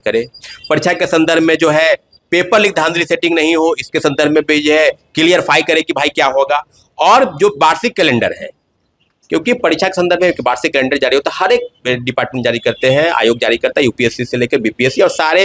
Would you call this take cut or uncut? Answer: uncut